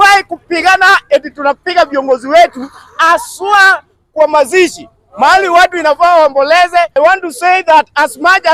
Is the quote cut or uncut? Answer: cut